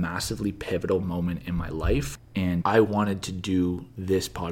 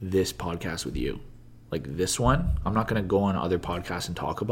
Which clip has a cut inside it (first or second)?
first